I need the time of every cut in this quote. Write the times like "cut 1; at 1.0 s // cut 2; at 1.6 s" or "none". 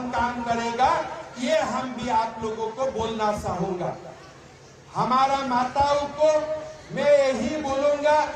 none